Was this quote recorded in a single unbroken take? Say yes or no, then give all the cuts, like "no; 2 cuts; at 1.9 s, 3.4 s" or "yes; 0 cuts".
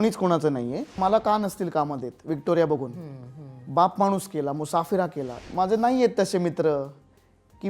no; 2 cuts; at 1.0 s, 5.3 s